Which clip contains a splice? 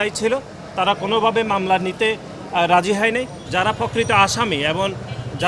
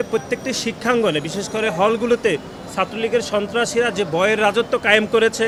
first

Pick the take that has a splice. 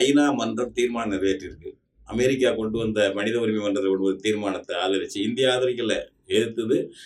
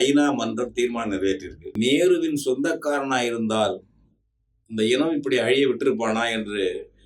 second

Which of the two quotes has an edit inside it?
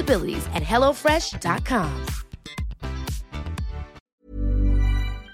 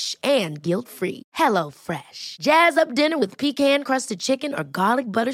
first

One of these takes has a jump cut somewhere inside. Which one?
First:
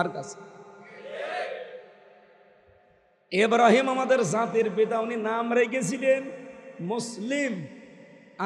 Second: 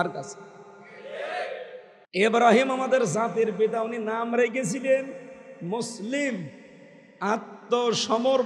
second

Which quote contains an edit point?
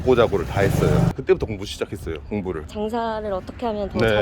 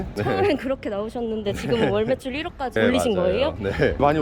first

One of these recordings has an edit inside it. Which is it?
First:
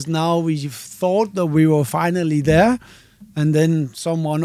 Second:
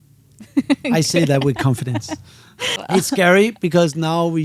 second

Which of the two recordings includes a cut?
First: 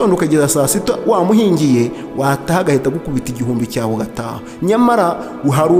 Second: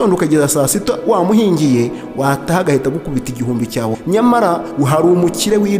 second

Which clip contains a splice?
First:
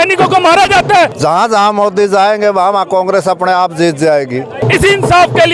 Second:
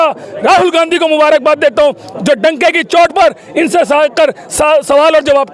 first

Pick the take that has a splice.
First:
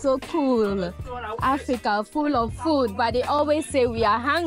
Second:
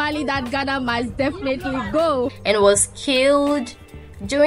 second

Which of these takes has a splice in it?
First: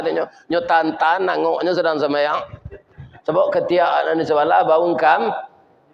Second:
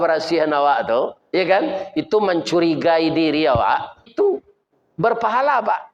second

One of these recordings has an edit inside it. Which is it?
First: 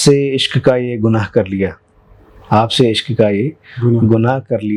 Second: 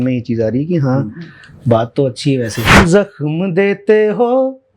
second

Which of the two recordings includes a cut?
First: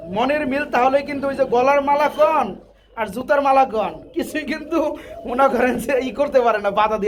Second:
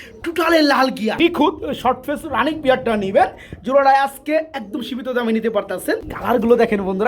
second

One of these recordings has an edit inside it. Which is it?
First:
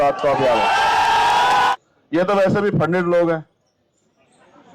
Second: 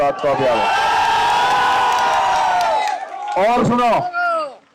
first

